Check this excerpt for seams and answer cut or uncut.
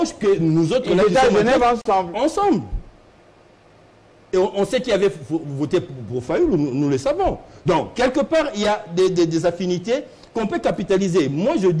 uncut